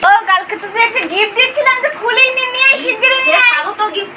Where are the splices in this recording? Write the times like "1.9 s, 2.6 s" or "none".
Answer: none